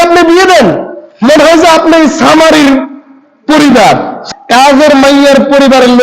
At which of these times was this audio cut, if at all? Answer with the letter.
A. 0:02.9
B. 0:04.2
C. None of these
B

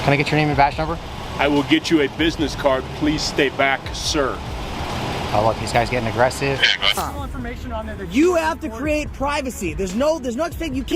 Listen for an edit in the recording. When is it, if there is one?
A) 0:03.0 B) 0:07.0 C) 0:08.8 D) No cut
B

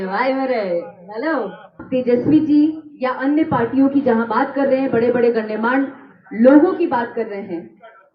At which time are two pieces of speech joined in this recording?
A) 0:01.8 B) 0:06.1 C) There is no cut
A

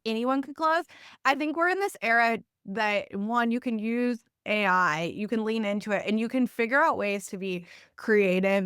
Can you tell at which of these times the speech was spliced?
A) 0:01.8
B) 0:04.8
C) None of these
C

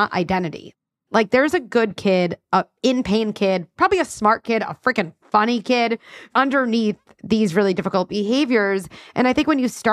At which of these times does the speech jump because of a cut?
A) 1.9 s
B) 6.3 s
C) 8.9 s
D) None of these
B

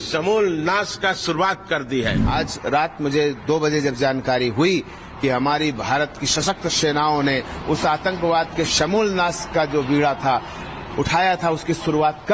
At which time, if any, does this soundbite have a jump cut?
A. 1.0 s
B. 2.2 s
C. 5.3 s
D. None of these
B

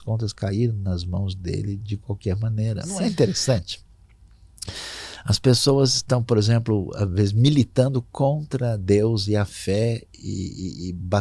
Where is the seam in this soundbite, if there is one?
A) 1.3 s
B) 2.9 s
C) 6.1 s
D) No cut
B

